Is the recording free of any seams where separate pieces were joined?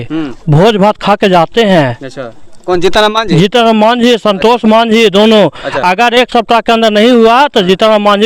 yes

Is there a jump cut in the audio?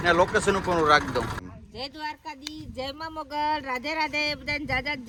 no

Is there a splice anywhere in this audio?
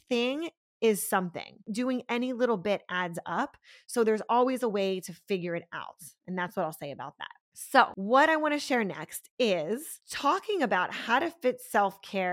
no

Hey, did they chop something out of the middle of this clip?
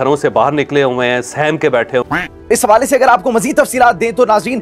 no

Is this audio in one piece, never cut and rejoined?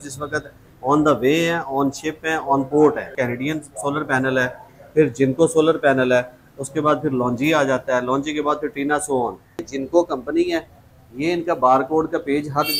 no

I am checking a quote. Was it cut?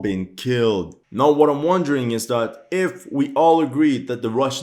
yes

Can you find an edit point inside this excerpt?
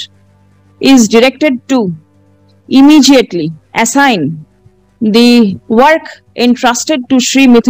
yes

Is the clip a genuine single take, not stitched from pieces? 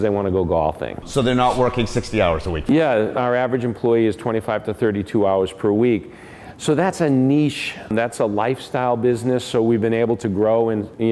yes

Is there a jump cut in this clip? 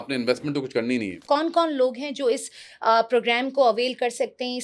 yes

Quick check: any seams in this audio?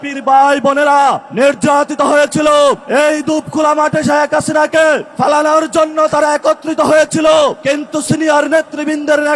yes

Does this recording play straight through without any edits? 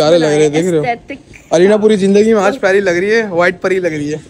yes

